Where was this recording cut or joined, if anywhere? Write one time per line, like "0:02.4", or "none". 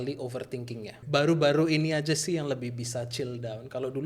0:01.0